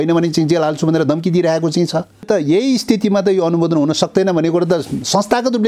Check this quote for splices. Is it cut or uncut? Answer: cut